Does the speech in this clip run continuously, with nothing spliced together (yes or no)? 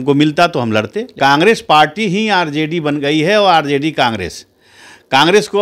no